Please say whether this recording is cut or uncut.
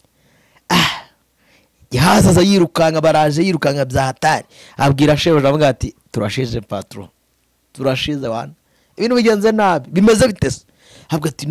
uncut